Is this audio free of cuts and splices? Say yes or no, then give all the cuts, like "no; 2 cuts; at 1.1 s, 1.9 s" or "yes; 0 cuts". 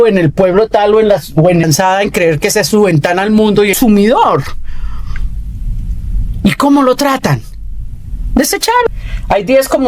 no; 3 cuts; at 1.6 s, 3.8 s, 8.9 s